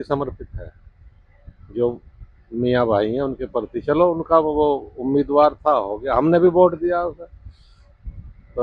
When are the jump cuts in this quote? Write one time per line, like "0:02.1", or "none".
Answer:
none